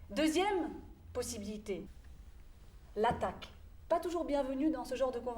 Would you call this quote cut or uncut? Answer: cut